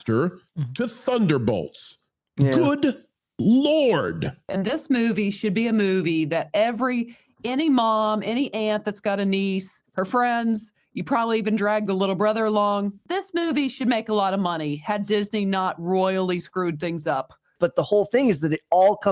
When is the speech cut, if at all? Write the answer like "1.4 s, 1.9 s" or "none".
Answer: 4.5 s, 9.8 s, 13.0 s, 17.5 s

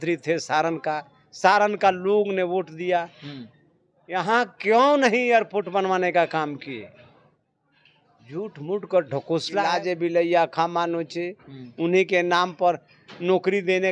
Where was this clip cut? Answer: 9.7 s

